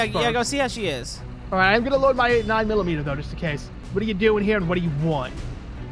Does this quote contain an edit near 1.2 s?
no; 1 cut; at 3.8 s

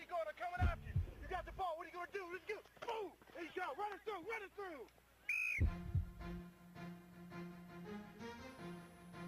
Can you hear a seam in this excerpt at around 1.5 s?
yes; 1 cut; at 1.5 s

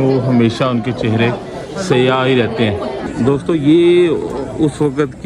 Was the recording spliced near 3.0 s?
yes; 1 cut; at 3.0 s

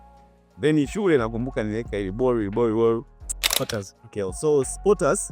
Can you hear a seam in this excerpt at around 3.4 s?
yes; 1 cut; at 3.4 s

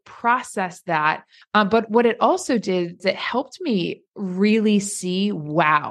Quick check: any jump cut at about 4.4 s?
no; 2 cuts; at 1.3 s, 3.0 s

